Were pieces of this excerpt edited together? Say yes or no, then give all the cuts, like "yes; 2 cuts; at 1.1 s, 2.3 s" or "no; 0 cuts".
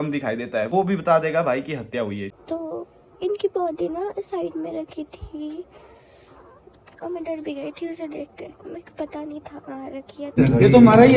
yes; 2 cuts; at 2.3 s, 10.3 s